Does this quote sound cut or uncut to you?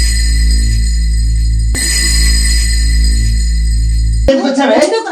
cut